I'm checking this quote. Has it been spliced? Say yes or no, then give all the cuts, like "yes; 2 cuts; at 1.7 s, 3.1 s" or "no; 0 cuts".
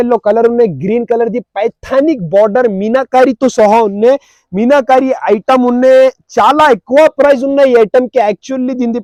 no; 0 cuts